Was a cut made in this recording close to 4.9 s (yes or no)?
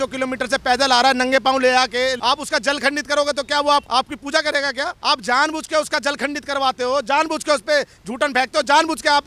yes